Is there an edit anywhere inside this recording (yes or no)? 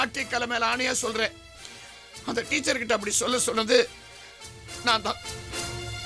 no